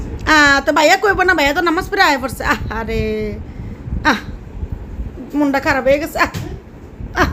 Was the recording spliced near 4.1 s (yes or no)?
no